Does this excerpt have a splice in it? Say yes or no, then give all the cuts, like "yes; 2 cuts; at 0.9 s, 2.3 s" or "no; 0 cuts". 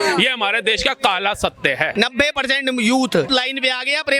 yes; 2 cuts; at 1.9 s, 3.3 s